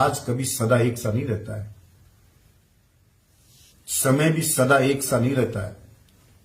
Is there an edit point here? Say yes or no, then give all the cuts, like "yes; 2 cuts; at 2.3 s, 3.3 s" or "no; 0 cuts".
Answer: yes; 1 cut; at 3.1 s